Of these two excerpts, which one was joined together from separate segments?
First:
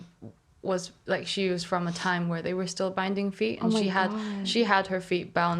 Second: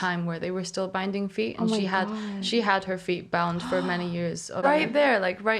second; 1 cut; at 4.6 s

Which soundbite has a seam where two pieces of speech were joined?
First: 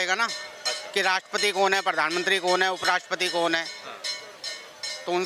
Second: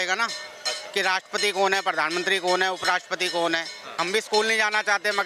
second; 1 cut; at 3.9 s

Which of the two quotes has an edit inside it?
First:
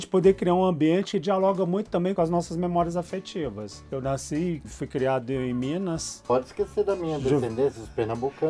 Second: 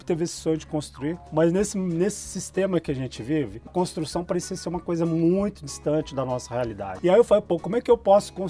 first; 3 cuts; at 1.1 s, 2.1 s, 6.2 s

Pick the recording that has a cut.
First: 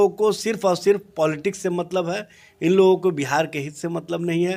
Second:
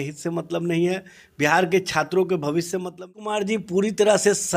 second; 1 cut; at 3.0 s

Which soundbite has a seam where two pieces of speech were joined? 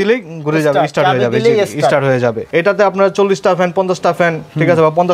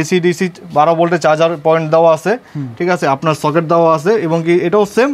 first; 1 cut; at 2.4 s

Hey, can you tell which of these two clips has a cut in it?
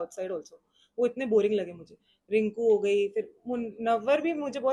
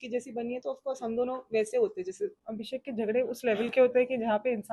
second; 1 cut; at 2.4 s

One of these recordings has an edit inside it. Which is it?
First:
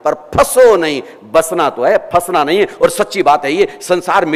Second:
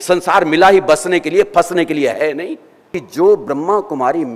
second; 1 cut; at 3.0 s

